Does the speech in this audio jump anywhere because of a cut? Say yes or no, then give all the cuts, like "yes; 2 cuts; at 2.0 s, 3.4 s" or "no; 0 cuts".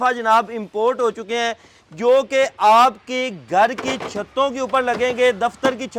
no; 0 cuts